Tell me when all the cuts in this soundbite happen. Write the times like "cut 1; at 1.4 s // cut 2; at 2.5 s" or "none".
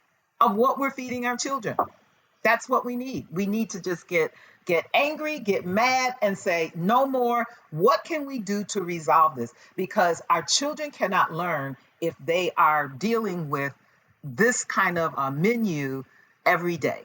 cut 1; at 15.1 s